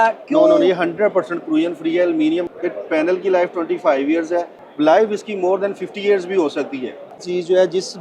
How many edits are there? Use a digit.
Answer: 3